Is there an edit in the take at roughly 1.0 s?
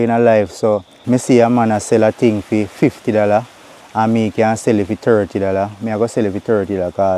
yes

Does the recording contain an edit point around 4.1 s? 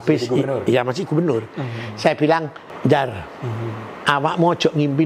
no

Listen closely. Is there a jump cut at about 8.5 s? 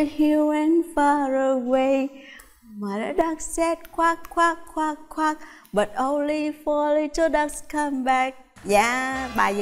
yes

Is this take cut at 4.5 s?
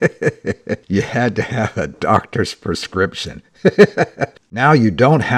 yes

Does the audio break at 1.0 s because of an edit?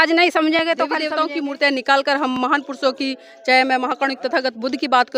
yes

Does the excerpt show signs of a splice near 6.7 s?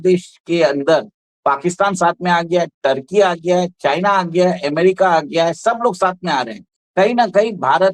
yes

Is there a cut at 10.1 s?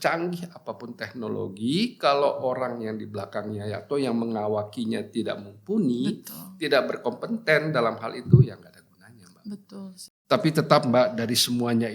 yes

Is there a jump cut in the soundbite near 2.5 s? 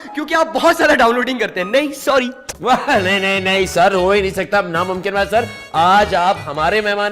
yes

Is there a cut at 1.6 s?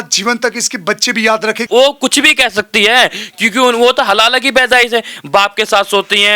yes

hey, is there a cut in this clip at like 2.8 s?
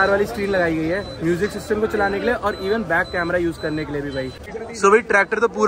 no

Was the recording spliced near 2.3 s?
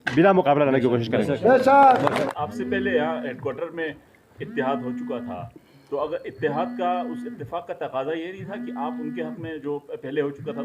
yes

